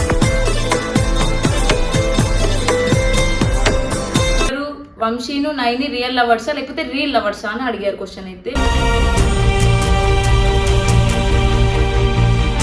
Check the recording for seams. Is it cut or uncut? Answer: cut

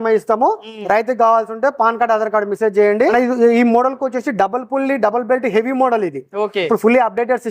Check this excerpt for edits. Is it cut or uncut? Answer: cut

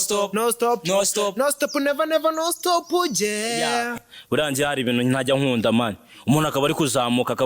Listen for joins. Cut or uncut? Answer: cut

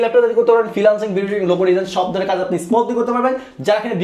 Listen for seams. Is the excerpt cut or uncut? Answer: uncut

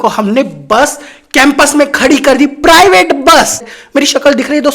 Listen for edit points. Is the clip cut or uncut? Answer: cut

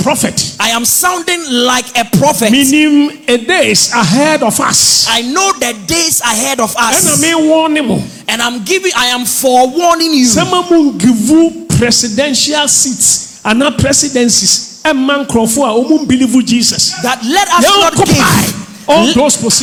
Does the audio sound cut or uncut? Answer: uncut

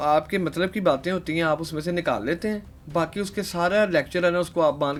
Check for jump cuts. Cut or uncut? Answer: uncut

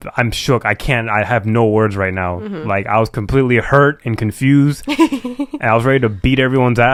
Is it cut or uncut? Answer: uncut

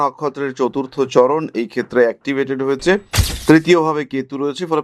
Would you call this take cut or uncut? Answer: uncut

